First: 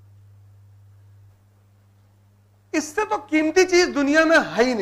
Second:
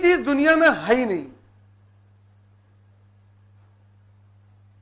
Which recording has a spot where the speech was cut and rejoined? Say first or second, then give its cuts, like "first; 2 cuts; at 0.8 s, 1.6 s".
first; 1 cut; at 1.3 s